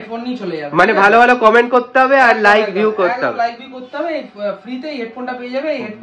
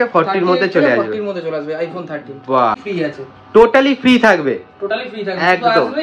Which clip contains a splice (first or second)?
second